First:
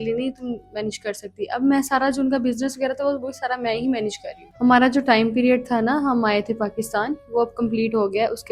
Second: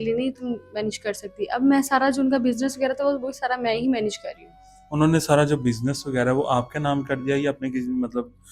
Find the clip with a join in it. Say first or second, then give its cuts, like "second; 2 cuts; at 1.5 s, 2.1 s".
first; 1 cut; at 4.4 s